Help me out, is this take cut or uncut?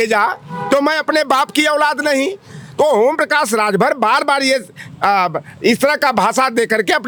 uncut